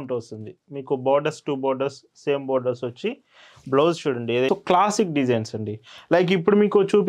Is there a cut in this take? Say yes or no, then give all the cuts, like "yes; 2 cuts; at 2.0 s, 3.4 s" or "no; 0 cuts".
yes; 1 cut; at 4.5 s